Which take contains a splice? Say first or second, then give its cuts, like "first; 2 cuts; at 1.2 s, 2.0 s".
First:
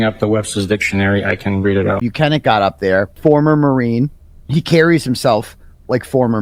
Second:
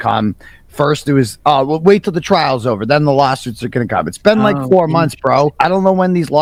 first; 2 cuts; at 2.0 s, 3.1 s